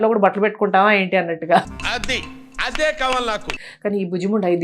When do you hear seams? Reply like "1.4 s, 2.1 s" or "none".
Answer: 3.5 s

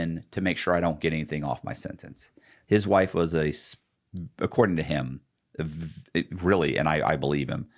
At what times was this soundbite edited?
none

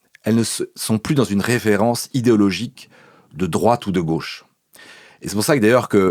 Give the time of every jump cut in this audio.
none

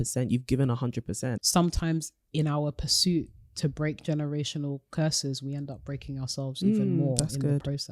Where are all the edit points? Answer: 1.3 s

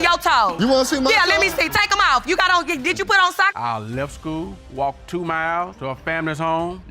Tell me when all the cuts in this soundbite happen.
3.5 s

